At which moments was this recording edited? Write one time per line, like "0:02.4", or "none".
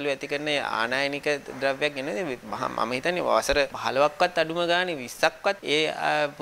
0:03.8
0:05.6